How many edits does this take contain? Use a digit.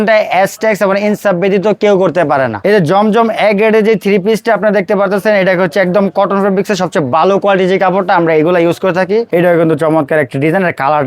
2